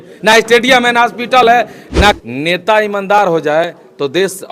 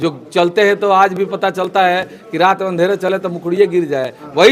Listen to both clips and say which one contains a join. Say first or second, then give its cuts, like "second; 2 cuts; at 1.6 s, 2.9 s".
first; 1 cut; at 2.2 s